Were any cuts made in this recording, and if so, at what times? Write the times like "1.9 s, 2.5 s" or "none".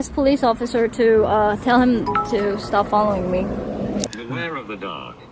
4.1 s

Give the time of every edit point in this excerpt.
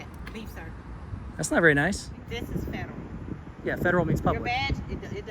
2.1 s

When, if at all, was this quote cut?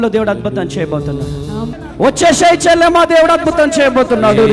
1.7 s

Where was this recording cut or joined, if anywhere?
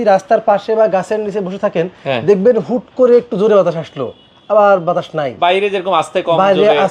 none

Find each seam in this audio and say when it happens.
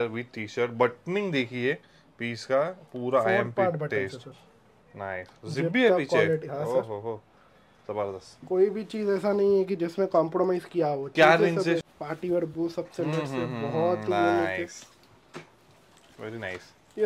11.8 s

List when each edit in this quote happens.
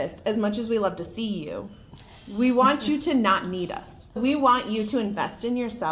4.2 s

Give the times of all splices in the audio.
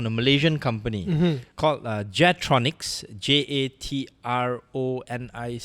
none

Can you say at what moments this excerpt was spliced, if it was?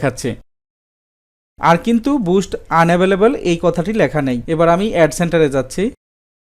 none

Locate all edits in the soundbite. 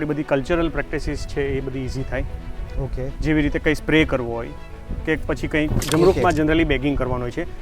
5.8 s

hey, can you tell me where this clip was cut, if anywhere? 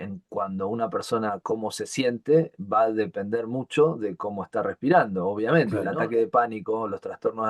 5.7 s

